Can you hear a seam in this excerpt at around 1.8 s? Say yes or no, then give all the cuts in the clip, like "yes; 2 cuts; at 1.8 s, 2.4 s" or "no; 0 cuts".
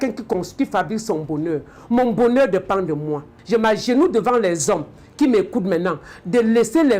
no; 1 cut; at 3.4 s